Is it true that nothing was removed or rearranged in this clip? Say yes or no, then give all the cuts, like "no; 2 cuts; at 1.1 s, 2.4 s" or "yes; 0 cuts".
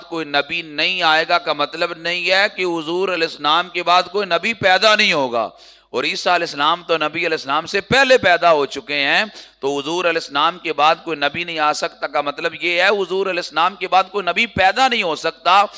yes; 0 cuts